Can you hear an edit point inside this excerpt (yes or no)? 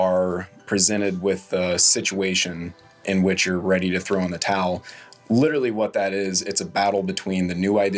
no